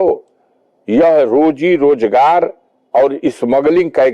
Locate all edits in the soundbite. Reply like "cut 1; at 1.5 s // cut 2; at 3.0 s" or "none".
none